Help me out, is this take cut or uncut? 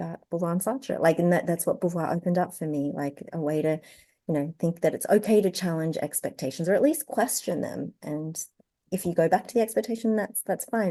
uncut